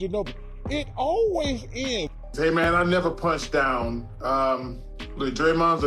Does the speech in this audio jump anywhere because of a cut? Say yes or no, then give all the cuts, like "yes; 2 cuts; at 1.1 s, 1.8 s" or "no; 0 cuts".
yes; 1 cut; at 2.6 s